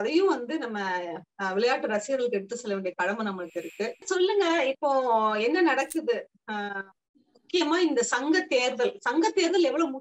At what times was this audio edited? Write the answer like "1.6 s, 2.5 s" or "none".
4.0 s